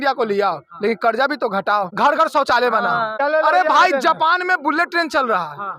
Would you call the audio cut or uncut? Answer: cut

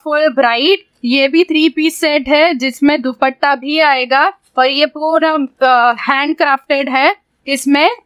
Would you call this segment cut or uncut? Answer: uncut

